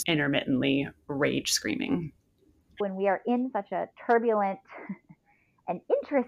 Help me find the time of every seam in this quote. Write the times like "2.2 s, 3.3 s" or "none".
2.8 s

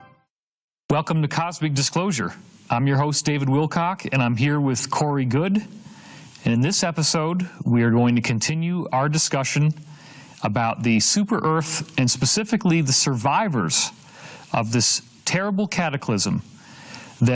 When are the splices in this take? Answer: none

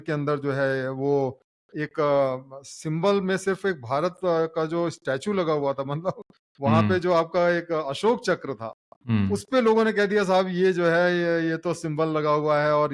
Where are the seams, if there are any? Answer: none

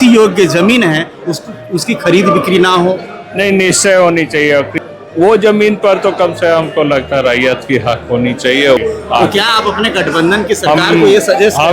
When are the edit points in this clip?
4.8 s, 8.8 s

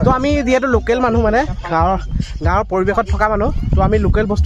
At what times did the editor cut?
none

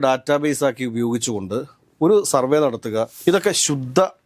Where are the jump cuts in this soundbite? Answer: 3.2 s

